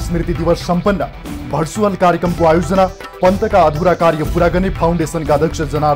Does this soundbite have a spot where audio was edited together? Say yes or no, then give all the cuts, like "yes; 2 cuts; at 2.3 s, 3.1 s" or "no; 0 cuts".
no; 0 cuts